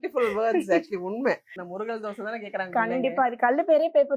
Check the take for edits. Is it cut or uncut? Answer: cut